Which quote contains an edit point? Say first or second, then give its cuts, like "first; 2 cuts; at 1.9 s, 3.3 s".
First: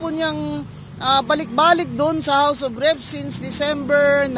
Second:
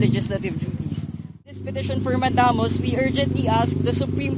second; 1 cut; at 1.5 s